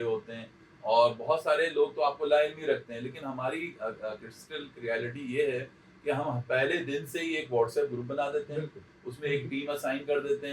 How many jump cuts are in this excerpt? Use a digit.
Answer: 0